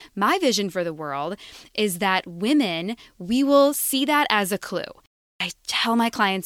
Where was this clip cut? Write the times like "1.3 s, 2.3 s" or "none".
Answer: 5.2 s